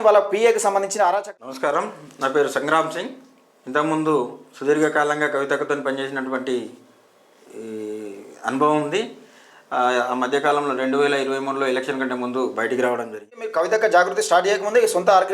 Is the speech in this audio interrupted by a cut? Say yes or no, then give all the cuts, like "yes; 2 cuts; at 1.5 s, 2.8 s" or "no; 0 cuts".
yes; 2 cuts; at 1.0 s, 13.5 s